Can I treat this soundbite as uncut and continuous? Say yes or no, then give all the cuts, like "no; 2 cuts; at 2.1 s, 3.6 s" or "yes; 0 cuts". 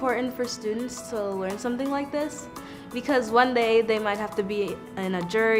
yes; 0 cuts